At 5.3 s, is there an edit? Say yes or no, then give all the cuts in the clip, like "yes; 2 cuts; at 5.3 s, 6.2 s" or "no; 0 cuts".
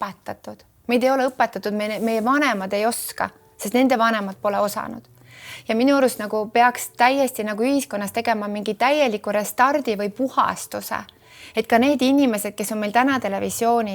no; 0 cuts